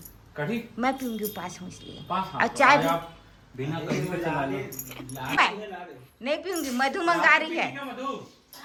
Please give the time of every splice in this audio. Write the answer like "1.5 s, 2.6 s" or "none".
none

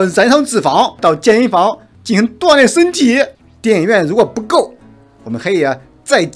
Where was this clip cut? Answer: 1.0 s, 3.5 s

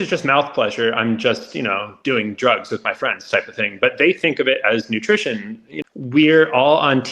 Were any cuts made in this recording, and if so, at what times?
5.9 s

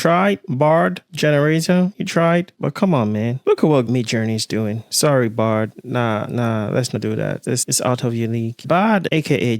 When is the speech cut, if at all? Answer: 8.6 s

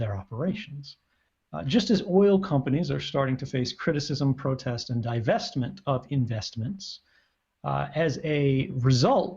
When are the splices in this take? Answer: 6.8 s

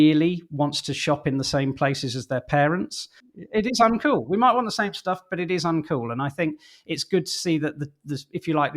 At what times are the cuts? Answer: 3.5 s

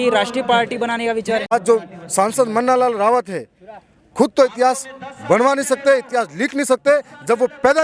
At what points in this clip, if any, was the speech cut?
1.5 s

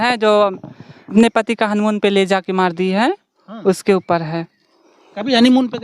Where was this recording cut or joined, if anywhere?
1.1 s

